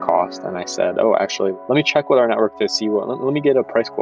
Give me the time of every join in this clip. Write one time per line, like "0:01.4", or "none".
0:01.5